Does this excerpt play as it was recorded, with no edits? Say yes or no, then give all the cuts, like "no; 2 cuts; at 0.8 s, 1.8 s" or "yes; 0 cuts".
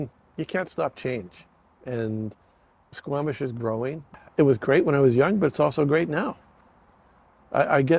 no; 1 cut; at 4.1 s